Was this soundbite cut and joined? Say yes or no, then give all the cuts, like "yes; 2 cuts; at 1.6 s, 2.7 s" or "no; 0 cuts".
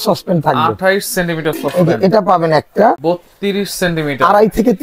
yes; 1 cut; at 3.0 s